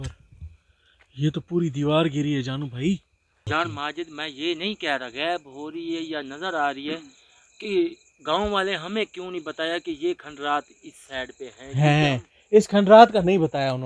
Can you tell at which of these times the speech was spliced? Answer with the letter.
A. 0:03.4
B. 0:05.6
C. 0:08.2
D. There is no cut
A